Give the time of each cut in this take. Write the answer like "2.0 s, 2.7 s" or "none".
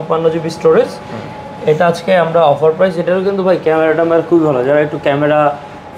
none

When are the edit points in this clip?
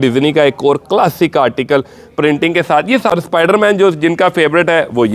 3.1 s

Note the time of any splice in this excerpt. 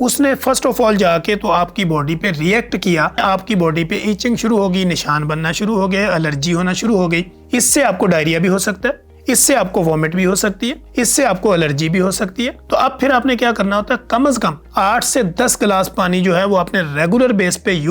3.2 s, 7.4 s, 9.1 s, 10.8 s, 12.6 s, 14.6 s

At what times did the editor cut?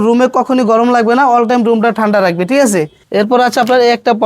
3.0 s

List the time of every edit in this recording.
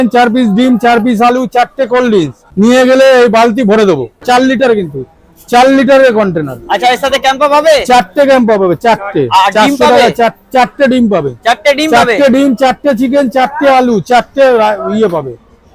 2.4 s, 4.2 s

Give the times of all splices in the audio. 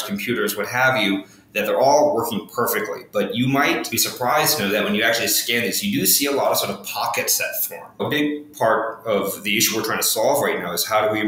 8.0 s

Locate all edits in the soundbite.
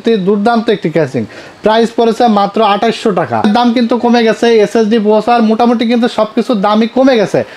3.4 s

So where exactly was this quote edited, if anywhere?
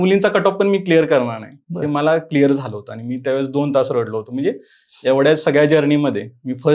none

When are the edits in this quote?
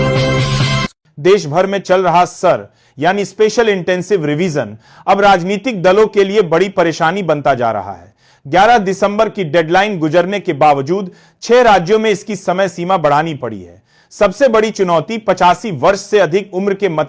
1.1 s

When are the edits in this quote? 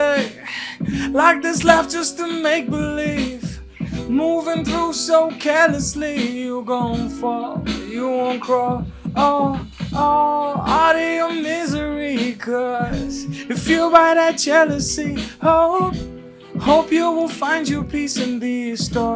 none

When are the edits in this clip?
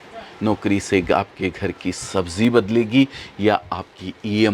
none

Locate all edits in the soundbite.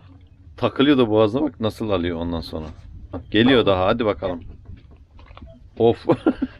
3.2 s

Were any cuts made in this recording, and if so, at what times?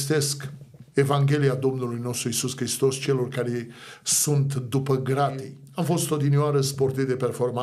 5.6 s

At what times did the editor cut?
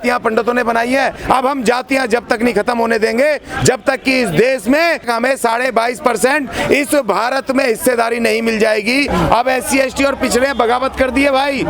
1.2 s, 5.1 s, 9.1 s

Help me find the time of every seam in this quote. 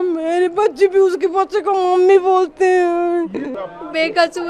3.5 s

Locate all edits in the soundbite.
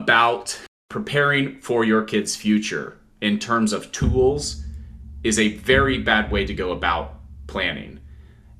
1.0 s

